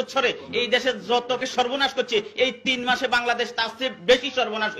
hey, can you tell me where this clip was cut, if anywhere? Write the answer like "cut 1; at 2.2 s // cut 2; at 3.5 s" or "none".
cut 1; at 1.4 s